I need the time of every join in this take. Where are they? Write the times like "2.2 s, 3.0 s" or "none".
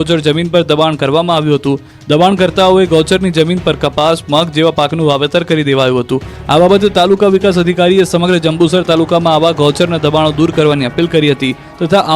9.0 s

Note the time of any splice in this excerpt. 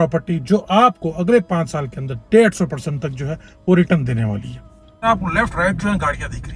5.0 s

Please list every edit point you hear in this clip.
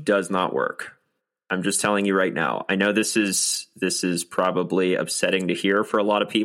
none

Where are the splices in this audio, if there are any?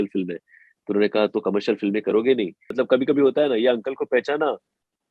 2.6 s

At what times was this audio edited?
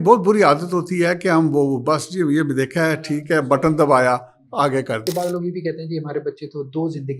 5.0 s

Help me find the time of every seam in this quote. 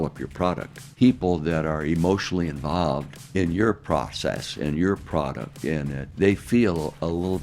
0.9 s, 3.2 s, 6.1 s

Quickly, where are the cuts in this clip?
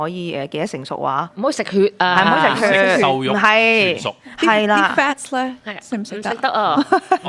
none

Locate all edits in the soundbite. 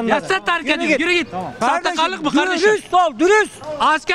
1.5 s

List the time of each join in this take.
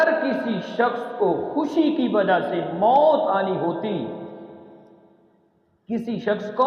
none

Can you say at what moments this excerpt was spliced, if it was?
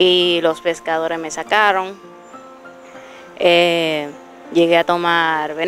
none

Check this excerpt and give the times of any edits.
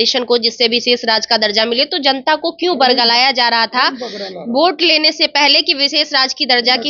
none

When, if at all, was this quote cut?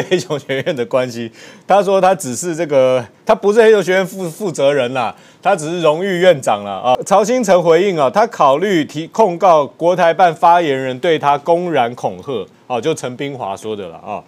7.0 s

